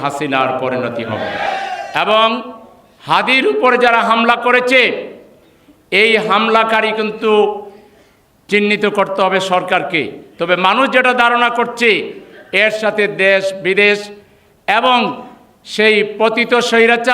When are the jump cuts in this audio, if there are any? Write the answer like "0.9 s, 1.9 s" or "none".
1.4 s